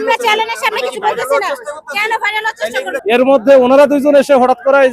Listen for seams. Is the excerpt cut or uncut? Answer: cut